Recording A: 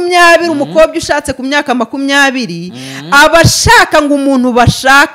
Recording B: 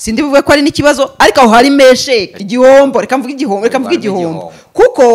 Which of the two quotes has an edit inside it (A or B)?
B